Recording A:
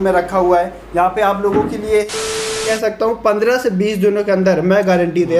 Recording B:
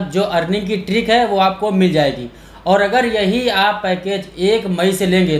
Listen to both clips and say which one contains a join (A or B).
A